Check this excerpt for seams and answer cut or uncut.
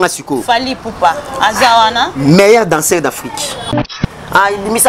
cut